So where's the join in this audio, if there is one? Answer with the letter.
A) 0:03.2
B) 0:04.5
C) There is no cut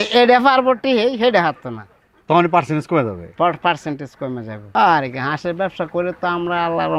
B